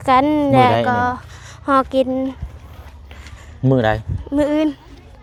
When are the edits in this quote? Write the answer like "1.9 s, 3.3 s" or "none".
none